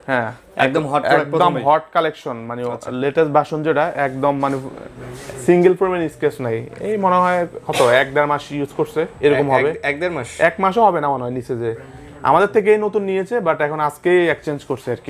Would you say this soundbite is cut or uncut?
uncut